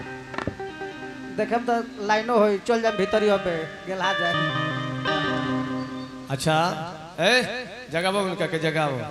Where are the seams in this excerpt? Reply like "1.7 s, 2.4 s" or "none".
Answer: 5.1 s